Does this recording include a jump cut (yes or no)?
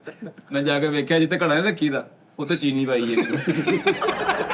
no